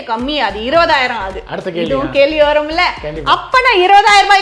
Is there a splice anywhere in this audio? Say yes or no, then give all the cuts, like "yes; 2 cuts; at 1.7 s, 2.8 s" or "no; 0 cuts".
no; 0 cuts